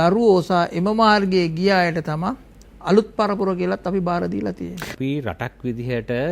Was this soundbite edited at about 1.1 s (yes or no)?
no